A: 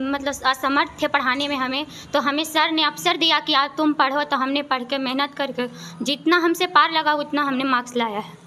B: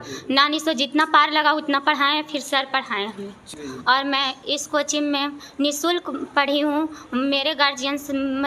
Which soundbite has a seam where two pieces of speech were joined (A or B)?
B